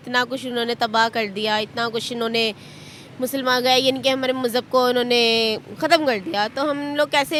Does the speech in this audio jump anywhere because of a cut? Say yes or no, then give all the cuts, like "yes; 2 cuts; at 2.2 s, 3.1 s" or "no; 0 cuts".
no; 0 cuts